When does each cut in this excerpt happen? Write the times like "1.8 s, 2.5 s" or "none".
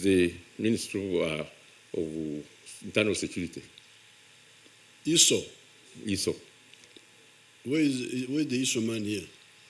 none